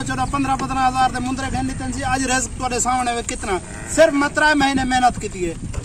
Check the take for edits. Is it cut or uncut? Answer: uncut